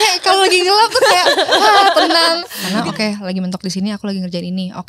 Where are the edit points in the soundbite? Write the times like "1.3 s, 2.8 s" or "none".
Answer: 2.5 s